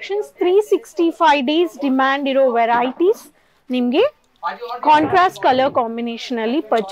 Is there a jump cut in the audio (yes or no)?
no